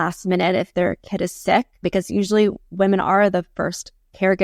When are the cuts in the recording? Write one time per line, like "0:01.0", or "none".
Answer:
0:01.8